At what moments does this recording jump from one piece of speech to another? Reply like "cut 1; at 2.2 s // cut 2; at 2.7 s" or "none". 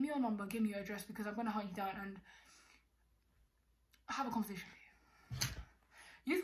none